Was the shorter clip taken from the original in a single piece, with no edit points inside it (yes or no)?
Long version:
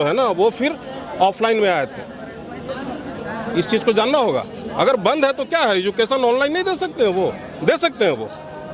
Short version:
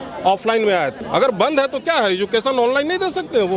no